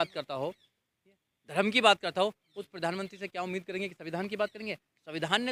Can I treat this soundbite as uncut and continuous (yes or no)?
yes